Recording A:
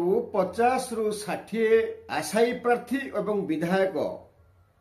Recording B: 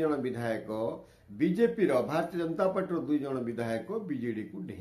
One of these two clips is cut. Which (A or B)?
A